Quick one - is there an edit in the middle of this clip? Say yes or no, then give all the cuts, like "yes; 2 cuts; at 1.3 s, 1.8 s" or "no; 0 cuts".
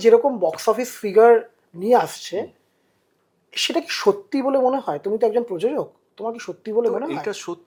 no; 0 cuts